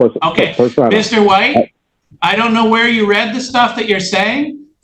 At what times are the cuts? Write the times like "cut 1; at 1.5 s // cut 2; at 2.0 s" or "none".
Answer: none